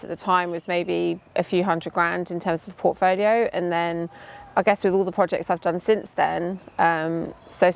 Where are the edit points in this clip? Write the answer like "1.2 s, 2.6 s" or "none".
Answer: none